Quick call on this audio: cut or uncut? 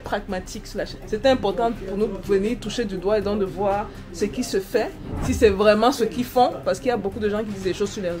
cut